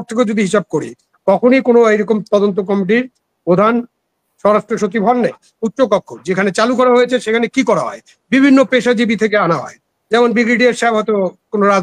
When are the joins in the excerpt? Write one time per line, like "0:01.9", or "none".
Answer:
0:05.4

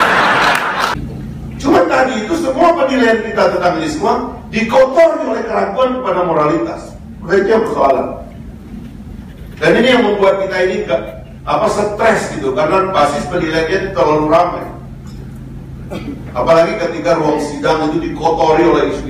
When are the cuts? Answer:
0:00.9

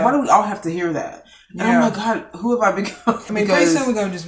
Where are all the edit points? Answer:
0:03.3

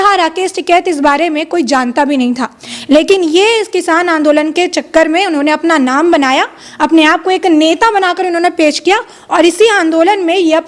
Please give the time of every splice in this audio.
none

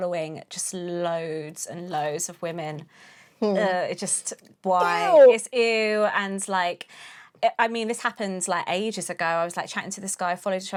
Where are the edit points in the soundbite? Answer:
none

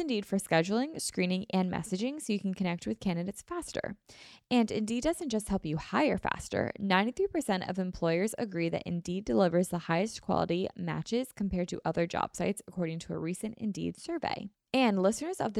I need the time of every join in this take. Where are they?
0:14.5

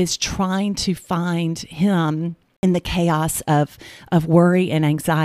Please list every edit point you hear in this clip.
0:02.4

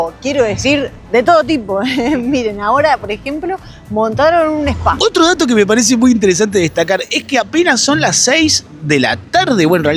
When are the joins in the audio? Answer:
none

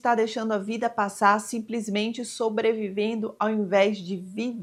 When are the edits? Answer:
none

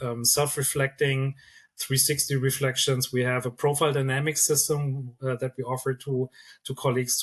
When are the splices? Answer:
none

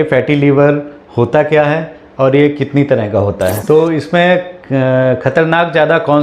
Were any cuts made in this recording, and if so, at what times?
0:03.6

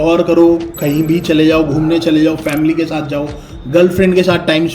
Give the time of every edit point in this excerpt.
none

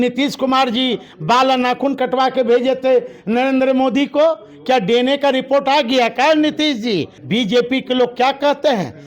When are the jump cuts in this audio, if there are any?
0:07.1

